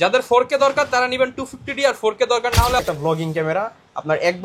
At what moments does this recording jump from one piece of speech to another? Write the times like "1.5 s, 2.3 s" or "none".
2.8 s